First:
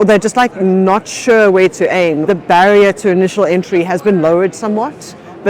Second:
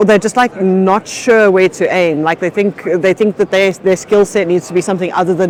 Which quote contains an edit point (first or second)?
first